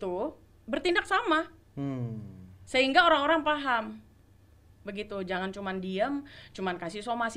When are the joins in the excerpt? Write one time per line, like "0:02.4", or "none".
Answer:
none